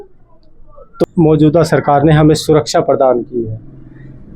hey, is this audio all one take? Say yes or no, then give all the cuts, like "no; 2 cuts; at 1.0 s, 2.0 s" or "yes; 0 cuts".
no; 1 cut; at 0.9 s